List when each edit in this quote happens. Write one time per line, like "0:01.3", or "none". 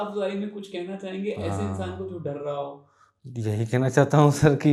none